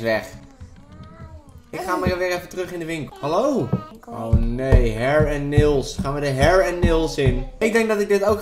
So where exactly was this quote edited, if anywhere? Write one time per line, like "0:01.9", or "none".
0:03.1
0:04.0
0:07.5